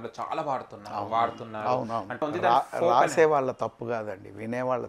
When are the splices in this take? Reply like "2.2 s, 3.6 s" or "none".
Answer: 2.2 s